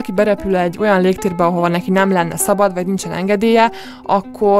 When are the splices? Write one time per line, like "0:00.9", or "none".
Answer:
none